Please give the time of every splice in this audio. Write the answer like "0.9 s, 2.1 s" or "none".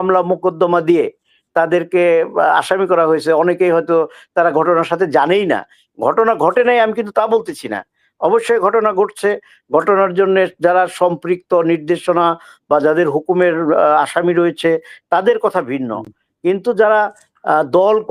none